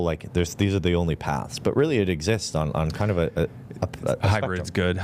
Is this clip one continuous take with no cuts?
yes; 0 cuts

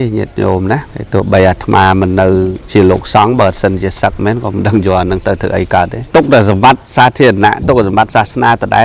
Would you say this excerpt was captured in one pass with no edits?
no; 3 cuts; at 0.9 s, 2.6 s, 6.0 s

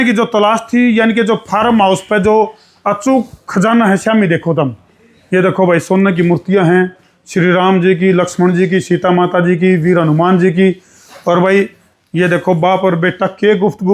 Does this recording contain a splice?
no; 0 cuts

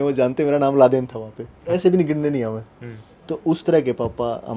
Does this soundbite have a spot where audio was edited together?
yes; 1 cut; at 1.8 s

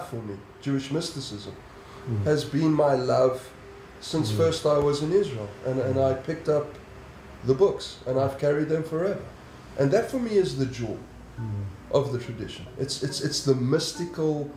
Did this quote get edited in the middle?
no; 0 cuts

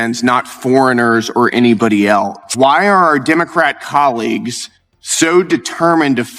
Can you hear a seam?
yes; 1 cut; at 2.4 s

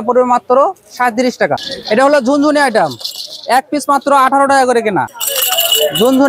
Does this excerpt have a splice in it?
yes; 2 cuts; at 1.7 s, 5.2 s

